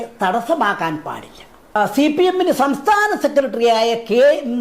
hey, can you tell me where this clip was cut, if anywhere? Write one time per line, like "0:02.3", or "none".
0:01.8